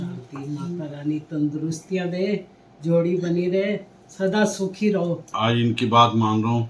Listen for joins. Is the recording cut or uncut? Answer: cut